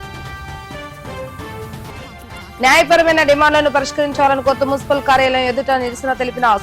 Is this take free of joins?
no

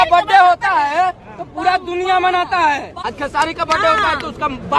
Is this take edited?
yes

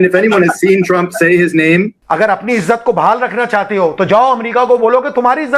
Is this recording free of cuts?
no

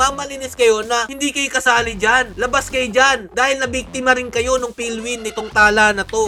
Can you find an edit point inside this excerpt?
no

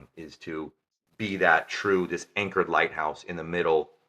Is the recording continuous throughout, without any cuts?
yes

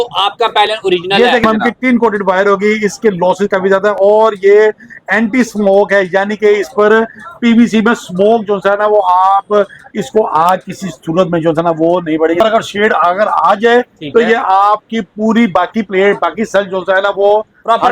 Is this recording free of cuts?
no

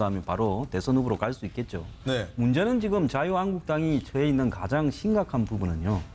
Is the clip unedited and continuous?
yes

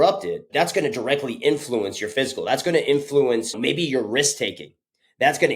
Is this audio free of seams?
no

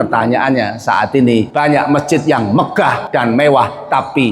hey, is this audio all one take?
no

